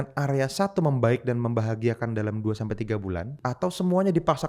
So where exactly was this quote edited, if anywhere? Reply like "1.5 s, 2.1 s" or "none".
3.3 s